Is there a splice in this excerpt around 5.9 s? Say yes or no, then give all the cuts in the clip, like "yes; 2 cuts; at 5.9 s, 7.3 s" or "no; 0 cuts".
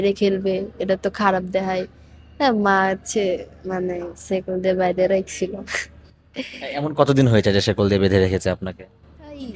no; 0 cuts